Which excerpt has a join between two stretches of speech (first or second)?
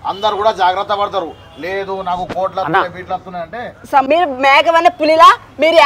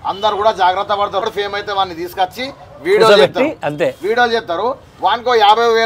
second